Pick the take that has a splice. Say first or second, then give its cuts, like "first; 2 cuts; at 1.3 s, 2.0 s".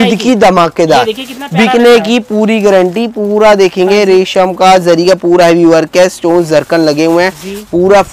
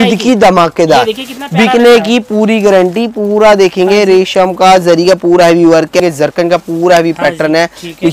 second; 1 cut; at 6.0 s